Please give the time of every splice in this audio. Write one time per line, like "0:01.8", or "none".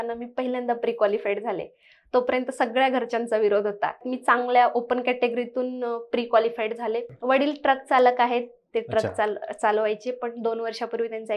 0:04.0
0:07.1